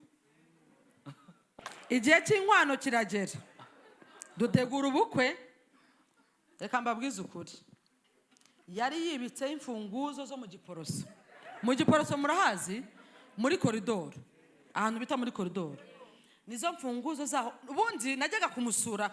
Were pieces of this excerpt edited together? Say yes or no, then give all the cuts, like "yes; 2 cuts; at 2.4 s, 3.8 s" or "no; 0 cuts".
yes; 1 cut; at 1.5 s